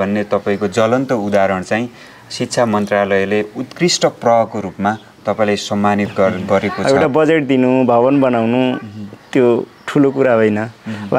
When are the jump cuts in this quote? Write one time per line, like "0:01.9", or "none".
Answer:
0:06.8

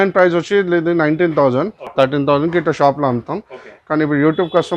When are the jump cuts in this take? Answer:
0:01.8

